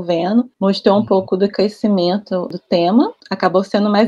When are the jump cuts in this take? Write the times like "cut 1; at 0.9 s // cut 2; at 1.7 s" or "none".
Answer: none

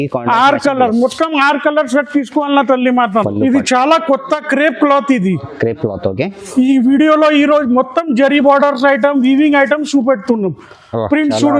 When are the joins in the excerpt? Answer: cut 1; at 3.2 s

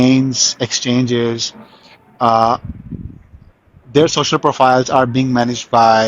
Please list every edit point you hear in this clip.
none

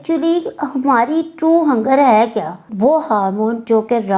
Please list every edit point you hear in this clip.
cut 1; at 2.6 s

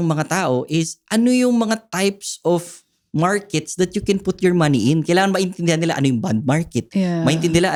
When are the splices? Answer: none

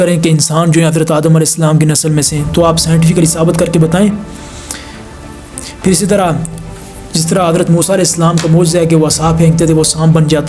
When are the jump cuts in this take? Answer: none

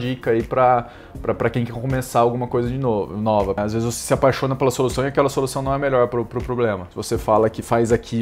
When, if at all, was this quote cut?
cut 1; at 3.6 s // cut 2; at 6.9 s

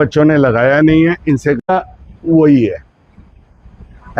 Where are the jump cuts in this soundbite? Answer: cut 1; at 1.6 s

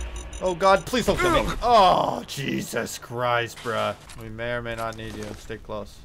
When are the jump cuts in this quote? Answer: cut 1; at 4.0 s

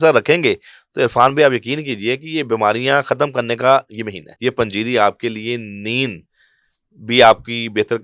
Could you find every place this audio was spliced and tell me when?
cut 1; at 4.2 s

